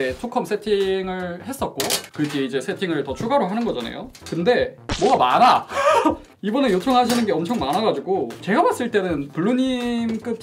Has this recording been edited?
no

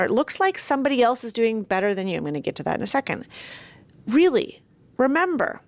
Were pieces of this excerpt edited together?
no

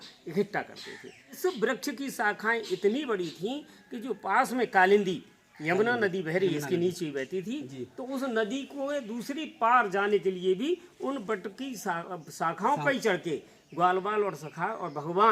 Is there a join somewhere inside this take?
yes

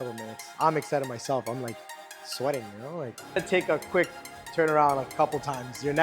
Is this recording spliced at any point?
yes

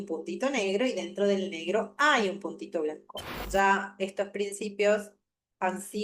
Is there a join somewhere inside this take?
yes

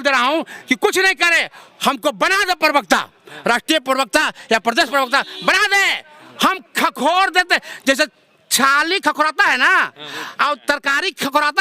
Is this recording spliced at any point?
no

